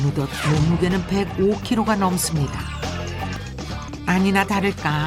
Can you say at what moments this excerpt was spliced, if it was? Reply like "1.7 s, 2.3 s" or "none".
3.4 s